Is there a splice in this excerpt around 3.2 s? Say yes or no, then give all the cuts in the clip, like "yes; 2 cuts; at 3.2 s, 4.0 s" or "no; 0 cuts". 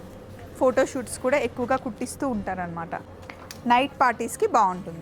yes; 1 cut; at 3.2 s